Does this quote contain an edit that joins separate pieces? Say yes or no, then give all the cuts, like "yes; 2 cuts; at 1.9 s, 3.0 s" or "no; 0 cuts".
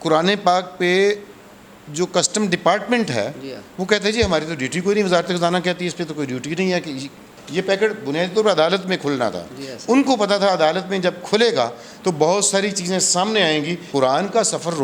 yes; 2 cuts; at 7.4 s, 13.8 s